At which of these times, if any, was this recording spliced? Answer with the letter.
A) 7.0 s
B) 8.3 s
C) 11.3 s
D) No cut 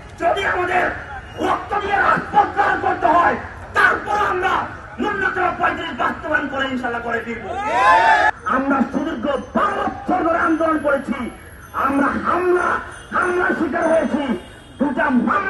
B